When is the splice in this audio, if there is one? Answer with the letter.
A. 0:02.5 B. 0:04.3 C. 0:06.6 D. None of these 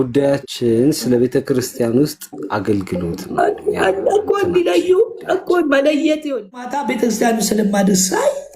C